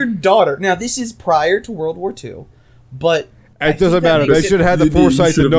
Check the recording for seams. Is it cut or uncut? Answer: uncut